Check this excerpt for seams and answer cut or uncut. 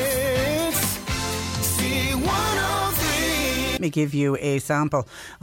uncut